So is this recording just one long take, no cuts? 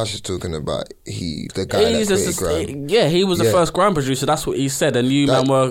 no; 1 cut; at 1.5 s

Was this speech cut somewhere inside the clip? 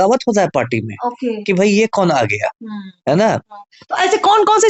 no; 0 cuts

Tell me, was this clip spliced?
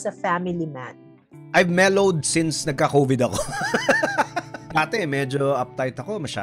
yes; 1 cut; at 4.7 s

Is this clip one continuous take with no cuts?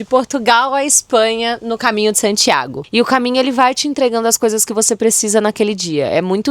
no; 1 cut; at 2.8 s

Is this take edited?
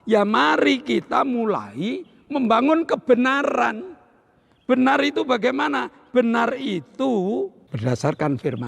yes; 1 cut; at 7.6 s

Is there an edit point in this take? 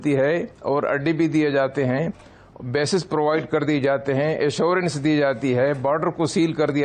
no; 0 cuts

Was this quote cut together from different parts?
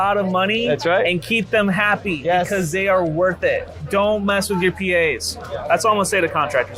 no; 0 cuts

